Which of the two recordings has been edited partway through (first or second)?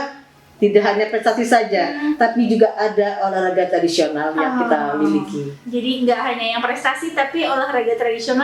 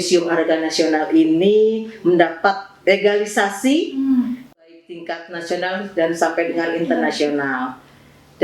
second